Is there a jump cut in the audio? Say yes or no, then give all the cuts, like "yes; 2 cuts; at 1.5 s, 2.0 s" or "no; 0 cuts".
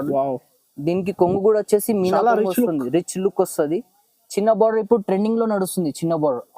no; 0 cuts